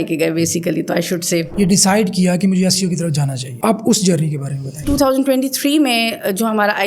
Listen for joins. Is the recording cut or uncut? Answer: cut